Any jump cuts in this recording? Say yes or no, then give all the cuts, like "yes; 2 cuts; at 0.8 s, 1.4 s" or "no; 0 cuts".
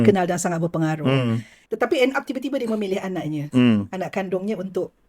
yes; 1 cut; at 1.5 s